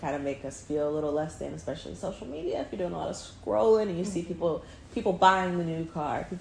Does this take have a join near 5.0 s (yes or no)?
no